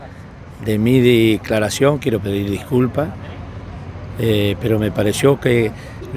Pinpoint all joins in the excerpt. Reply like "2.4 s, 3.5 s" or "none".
none